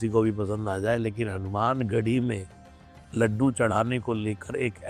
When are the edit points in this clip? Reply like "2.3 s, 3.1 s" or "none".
none